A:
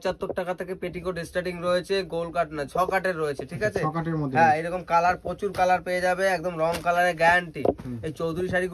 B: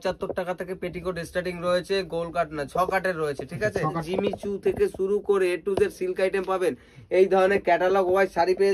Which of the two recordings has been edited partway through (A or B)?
B